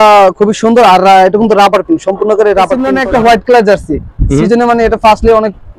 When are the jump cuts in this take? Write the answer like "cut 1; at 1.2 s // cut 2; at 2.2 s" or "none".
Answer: cut 1; at 2.9 s